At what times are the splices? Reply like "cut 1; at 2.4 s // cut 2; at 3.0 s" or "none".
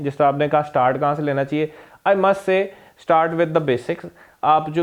none